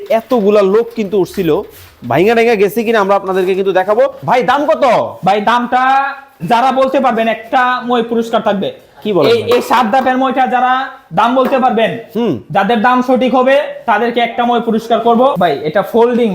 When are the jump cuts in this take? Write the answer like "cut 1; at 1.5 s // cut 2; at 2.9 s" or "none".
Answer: cut 1; at 4.2 s // cut 2; at 15.3 s